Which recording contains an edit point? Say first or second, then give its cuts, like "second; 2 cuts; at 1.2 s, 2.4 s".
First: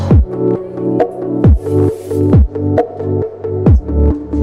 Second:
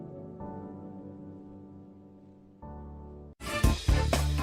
second; 1 cut; at 3.3 s